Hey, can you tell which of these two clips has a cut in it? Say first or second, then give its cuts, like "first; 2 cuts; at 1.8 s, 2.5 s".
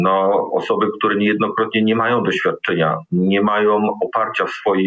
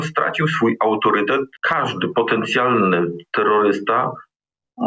second; 1 cut; at 1.6 s